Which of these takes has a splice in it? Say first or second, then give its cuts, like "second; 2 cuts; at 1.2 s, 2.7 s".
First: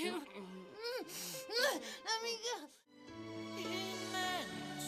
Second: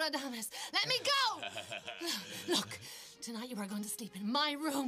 second; 1 cut; at 2.5 s